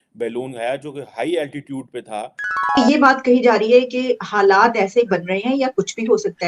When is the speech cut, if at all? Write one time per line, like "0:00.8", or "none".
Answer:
0:02.8